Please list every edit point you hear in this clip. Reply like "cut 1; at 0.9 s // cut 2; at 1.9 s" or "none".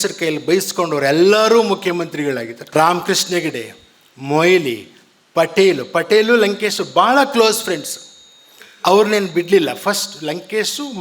cut 1; at 2.6 s